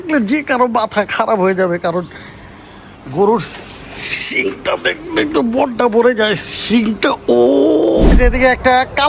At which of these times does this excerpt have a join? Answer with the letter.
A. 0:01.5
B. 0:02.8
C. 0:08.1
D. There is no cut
C